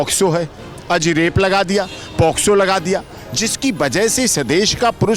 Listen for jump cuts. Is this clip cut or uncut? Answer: uncut